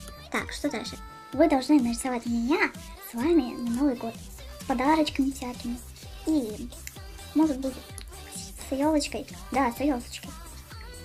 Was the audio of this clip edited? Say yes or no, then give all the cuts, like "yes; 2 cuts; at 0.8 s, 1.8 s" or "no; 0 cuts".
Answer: yes; 1 cut; at 4.9 s